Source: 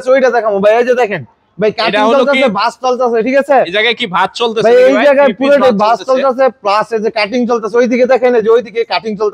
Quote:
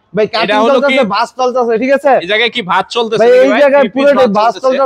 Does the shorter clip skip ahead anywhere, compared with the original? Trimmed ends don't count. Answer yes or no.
no